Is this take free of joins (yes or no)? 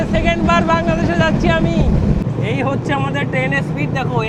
yes